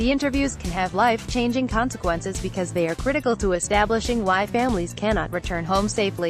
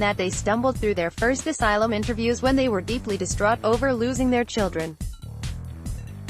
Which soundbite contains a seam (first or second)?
second